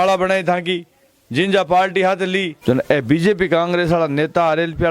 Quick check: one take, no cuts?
no; 1 cut; at 2.5 s

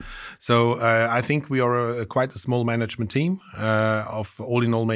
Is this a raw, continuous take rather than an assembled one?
yes; 0 cuts

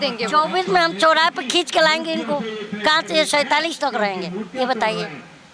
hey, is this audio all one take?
yes; 0 cuts

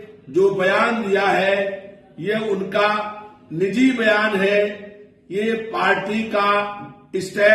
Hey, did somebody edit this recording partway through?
no; 0 cuts

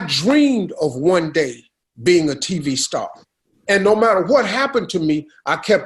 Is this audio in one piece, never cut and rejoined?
yes; 0 cuts

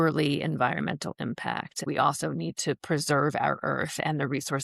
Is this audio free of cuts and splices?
no; 1 cut; at 1.8 s

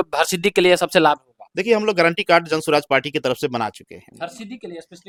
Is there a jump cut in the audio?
no; 0 cuts

